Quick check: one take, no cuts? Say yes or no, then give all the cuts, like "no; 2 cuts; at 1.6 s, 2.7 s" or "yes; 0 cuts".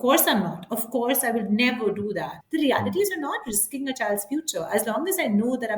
no; 1 cut; at 2.4 s